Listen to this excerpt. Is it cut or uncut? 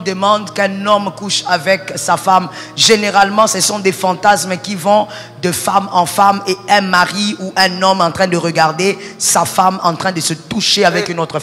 uncut